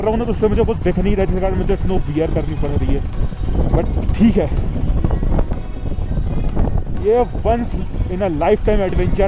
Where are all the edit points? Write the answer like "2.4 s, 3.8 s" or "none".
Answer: none